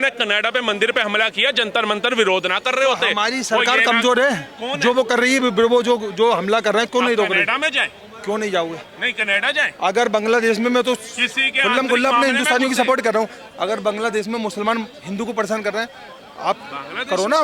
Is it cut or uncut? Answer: uncut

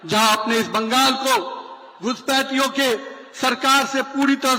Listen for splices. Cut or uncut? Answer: uncut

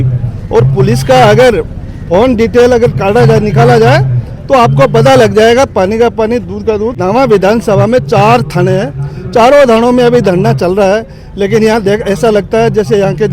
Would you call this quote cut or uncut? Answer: cut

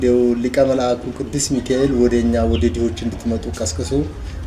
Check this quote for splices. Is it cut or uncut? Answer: uncut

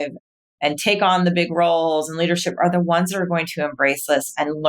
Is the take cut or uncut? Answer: uncut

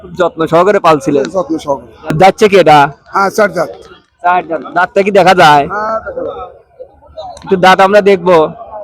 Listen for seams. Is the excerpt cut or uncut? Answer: cut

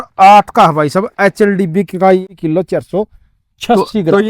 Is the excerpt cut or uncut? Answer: cut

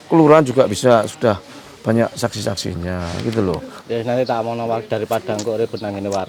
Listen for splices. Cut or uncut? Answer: cut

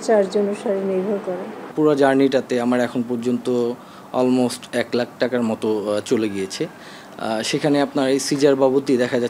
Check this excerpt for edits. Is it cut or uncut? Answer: uncut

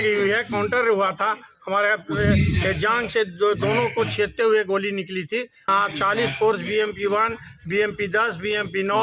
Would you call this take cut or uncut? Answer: cut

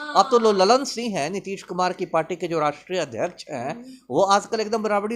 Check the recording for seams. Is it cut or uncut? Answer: uncut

